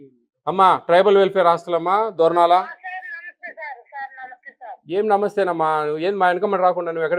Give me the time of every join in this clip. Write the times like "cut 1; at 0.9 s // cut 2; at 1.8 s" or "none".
none